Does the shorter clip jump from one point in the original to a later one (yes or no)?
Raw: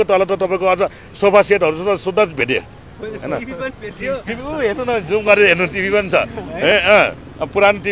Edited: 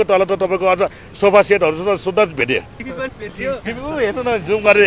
yes